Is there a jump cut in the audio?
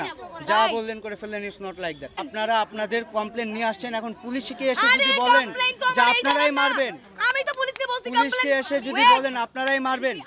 yes; 1 cut; at 2.3 s

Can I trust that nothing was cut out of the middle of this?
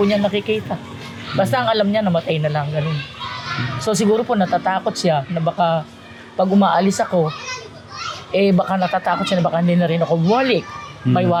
yes; 0 cuts

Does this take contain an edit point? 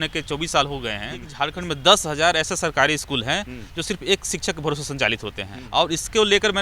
yes; 2 cuts; at 1.3 s, 5.5 s

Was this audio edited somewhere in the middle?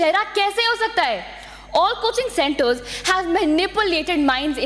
no; 0 cuts

